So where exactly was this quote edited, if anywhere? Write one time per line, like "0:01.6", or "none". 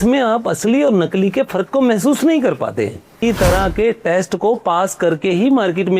0:03.2